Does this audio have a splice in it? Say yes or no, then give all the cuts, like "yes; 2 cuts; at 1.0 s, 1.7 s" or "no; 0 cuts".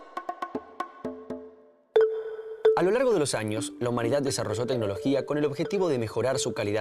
yes; 1 cut; at 1.2 s